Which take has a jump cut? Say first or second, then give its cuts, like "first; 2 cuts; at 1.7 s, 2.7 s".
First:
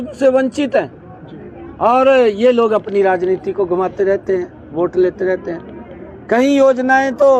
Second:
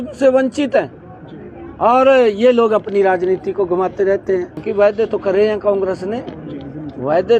second; 1 cut; at 4.6 s